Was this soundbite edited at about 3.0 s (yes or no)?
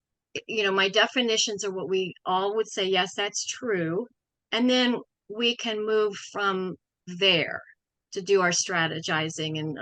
no